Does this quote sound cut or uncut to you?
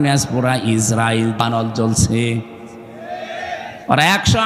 cut